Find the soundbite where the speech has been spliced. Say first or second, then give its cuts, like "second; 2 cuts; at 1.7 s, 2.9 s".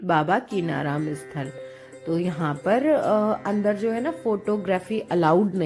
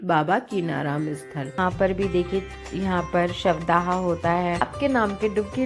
second; 2 cuts; at 1.5 s, 4.6 s